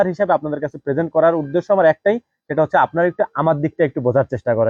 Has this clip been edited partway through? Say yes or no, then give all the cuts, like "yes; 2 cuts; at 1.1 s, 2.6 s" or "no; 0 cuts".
no; 0 cuts